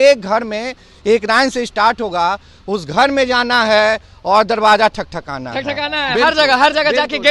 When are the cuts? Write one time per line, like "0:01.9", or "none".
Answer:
none